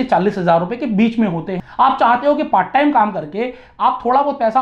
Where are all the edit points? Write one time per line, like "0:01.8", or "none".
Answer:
0:01.5